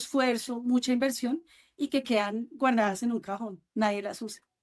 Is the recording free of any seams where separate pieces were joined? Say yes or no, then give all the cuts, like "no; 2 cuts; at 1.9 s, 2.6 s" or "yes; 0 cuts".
yes; 0 cuts